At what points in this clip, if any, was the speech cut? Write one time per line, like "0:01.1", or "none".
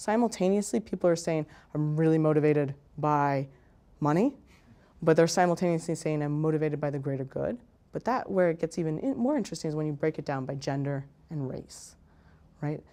none

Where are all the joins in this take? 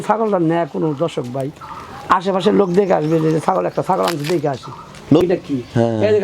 0:05.2

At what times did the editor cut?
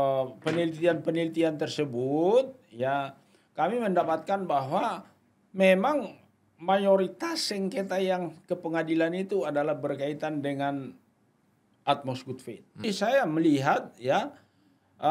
0:12.8

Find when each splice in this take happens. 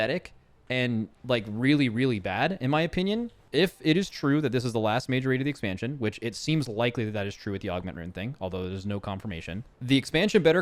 0:03.4
0:09.7

